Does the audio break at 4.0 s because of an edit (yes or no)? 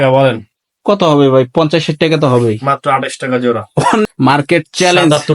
yes